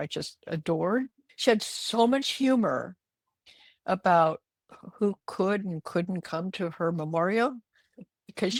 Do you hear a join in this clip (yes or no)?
no